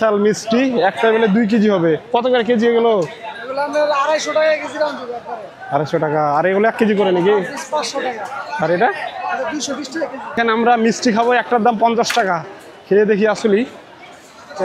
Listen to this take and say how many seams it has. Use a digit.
1